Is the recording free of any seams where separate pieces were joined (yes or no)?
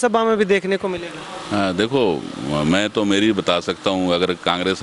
yes